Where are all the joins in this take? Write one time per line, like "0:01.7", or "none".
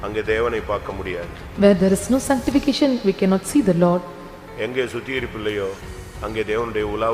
none